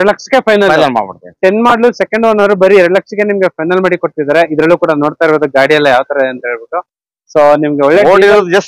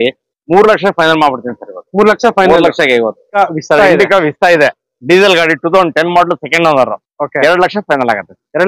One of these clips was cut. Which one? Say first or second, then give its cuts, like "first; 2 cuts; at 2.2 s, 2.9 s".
second; 1 cut; at 3.2 s